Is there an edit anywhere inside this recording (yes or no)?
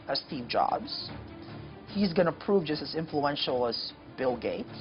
no